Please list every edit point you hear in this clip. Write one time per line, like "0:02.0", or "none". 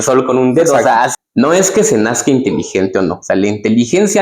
0:01.1